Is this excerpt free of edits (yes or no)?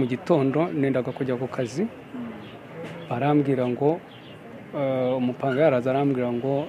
yes